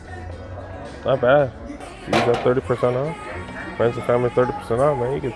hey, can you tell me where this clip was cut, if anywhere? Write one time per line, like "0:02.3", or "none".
0:01.9

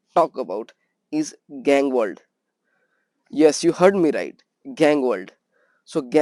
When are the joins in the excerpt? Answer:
none

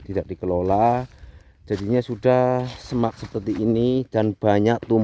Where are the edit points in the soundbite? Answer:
none

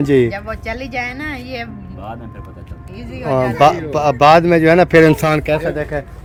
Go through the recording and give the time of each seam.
none

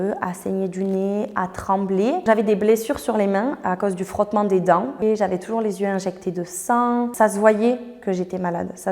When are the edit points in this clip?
0:02.2
0:04.9
0:07.1

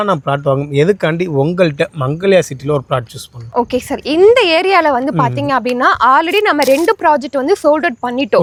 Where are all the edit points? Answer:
none

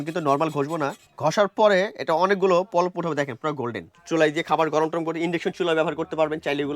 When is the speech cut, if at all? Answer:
0:01.0
0:04.0

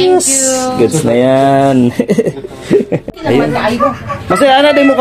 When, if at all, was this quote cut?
0:03.1

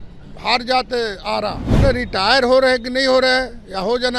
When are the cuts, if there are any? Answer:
0:01.7

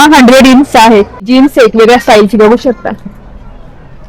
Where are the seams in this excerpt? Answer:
0:01.2

